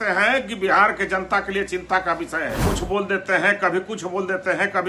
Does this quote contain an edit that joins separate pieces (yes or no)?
yes